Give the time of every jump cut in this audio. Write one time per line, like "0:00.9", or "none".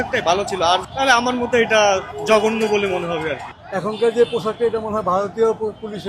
0:00.9
0:02.1
0:03.5